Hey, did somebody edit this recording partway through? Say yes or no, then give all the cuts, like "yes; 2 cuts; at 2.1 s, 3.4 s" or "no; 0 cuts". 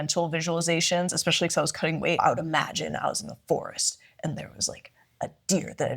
yes; 1 cut; at 2.2 s